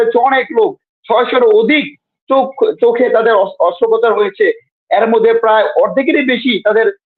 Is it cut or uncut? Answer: uncut